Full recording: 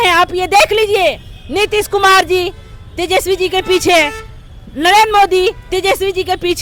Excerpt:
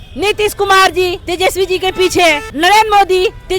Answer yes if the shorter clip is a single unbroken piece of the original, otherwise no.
no